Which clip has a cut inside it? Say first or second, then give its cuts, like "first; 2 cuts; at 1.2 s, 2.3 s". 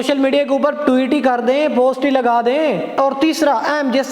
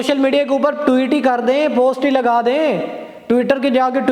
first; 1 cut; at 2.9 s